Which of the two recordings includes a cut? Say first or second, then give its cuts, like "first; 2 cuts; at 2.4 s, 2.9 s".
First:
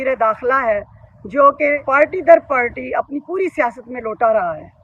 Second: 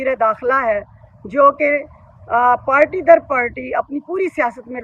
first; 1 cut; at 1.8 s